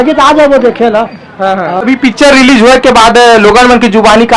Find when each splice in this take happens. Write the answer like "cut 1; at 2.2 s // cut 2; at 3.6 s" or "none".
cut 1; at 1.8 s